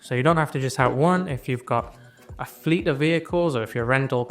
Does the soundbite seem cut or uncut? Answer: uncut